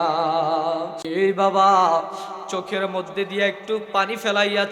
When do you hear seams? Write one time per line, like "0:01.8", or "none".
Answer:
0:01.0